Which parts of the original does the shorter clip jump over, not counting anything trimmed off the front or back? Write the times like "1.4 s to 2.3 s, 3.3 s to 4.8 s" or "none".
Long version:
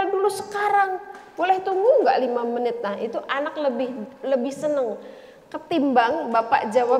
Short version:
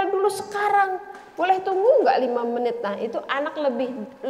none